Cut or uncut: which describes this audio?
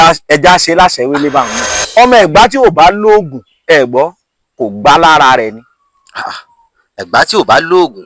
cut